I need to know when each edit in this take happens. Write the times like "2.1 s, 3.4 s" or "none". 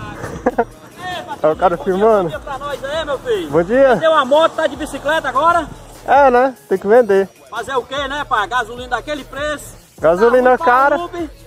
none